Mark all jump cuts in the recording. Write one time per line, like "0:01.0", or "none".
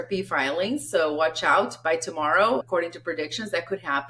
0:02.6